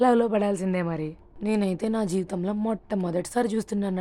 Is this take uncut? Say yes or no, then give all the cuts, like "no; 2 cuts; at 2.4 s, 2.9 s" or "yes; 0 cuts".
no; 1 cut; at 1.2 s